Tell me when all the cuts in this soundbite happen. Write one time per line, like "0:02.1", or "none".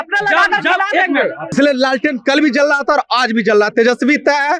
0:01.5